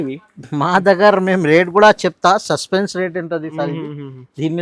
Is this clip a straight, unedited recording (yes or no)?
yes